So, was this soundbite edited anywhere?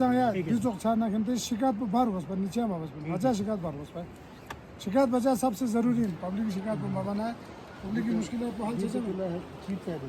no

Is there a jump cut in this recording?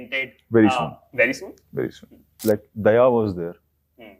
yes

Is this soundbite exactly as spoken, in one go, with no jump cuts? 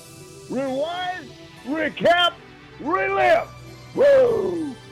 yes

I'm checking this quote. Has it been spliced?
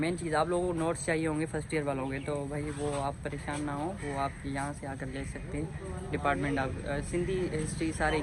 no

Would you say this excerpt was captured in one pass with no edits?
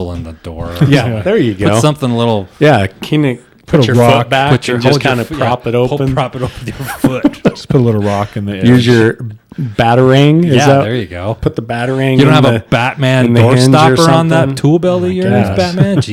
yes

